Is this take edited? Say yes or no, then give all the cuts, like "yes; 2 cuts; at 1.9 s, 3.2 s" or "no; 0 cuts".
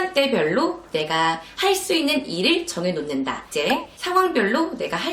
yes; 1 cut; at 3.5 s